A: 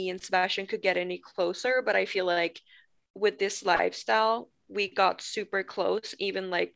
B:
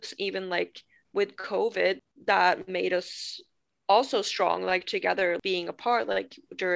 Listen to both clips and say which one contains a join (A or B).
B